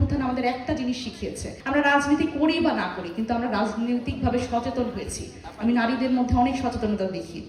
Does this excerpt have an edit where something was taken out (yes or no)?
yes